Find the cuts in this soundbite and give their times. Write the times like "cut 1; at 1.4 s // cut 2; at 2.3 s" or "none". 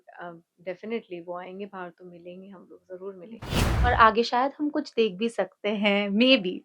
cut 1; at 3.5 s